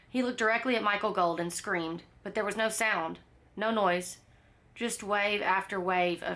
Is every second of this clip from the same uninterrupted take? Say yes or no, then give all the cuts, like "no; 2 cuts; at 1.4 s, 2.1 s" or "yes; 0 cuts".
yes; 0 cuts